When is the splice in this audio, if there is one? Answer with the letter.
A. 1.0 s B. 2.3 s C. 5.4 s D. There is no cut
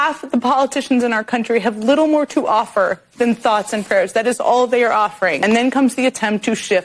C